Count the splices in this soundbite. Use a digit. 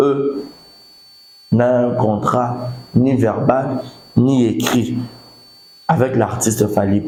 0